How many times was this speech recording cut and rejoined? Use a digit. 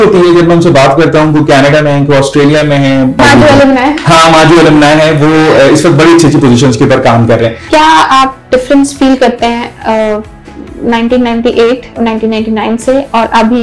2